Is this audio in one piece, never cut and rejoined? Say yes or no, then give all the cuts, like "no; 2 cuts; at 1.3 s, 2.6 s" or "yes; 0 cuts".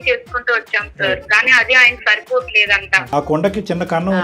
no; 1 cut; at 3.1 s